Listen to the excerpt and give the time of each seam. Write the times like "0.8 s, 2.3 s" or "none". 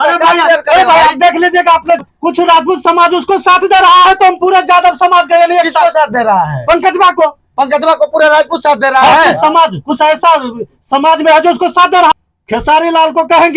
2.0 s, 12.1 s